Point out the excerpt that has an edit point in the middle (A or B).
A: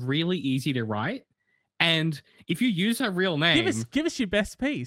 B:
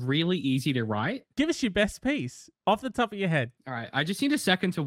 B